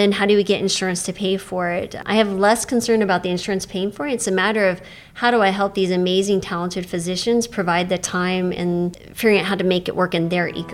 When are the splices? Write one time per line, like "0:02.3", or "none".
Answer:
0:02.0
0:09.0